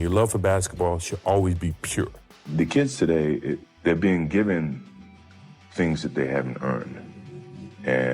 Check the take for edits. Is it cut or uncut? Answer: cut